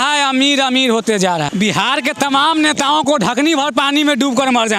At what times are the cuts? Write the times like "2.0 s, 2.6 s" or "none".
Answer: 1.5 s